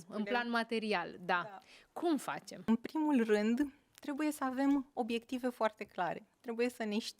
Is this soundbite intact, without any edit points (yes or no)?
no